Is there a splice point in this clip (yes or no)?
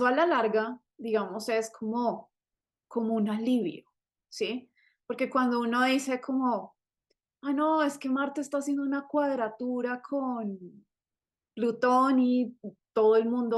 no